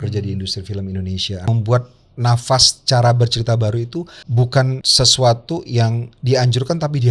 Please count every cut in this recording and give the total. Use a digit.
3